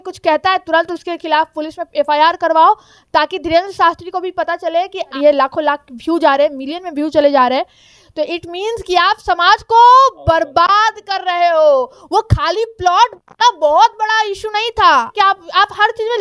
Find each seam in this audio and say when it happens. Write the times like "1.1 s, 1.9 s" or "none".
5.2 s, 15.1 s